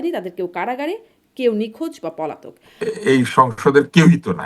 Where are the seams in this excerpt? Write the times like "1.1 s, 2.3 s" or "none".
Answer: 2.7 s